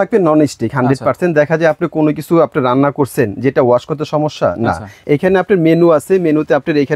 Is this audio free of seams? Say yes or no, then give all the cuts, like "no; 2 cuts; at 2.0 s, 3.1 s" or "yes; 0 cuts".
no; 1 cut; at 5.0 s